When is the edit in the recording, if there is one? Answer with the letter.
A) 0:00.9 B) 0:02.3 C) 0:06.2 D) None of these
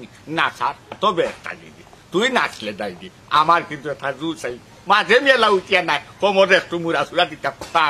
A